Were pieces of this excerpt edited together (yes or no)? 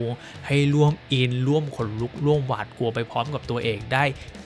no